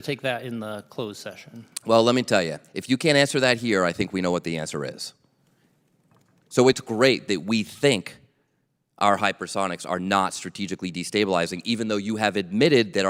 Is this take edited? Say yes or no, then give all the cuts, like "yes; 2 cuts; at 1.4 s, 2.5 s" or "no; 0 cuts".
no; 0 cuts